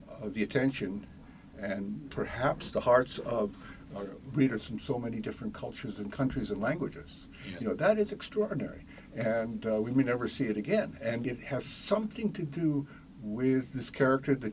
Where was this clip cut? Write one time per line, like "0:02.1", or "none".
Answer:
0:11.2